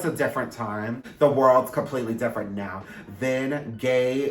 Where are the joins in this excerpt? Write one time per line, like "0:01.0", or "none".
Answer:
0:01.0